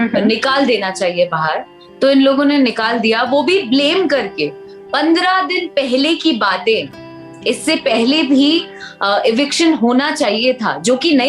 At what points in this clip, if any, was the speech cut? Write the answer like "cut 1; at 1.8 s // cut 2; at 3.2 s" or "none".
none